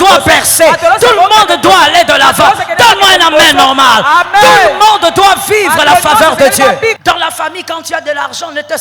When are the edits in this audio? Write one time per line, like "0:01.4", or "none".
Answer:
0:07.0